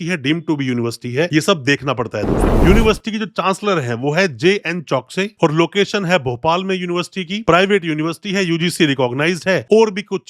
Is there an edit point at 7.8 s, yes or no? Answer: no